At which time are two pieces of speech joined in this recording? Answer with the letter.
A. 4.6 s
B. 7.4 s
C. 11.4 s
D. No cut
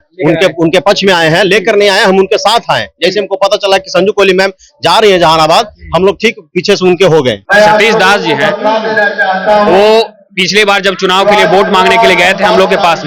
B